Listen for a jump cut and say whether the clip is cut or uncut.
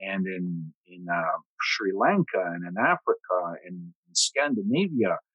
uncut